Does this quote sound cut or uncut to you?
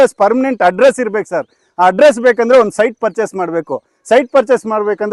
uncut